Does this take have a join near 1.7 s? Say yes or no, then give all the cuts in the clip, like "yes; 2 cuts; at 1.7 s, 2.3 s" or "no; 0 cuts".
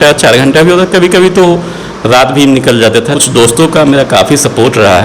no; 1 cut; at 3.2 s